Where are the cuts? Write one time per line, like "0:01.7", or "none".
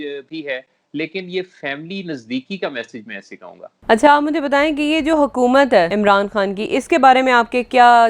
0:03.7
0:05.9